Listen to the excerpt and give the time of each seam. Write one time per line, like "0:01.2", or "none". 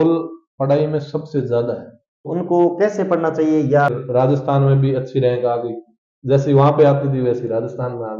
0:02.3
0:03.9

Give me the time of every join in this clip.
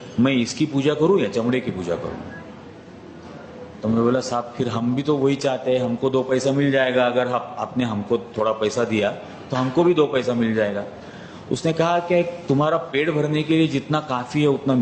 none

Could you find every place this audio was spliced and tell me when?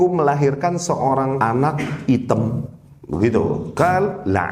0:01.4
0:03.7

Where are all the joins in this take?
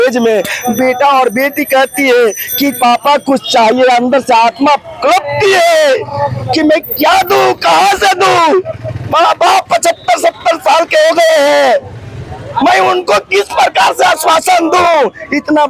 none

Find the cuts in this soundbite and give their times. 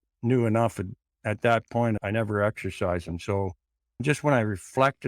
0:02.0
0:04.0

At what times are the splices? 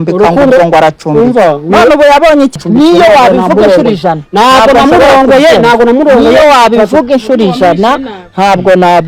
0:02.5

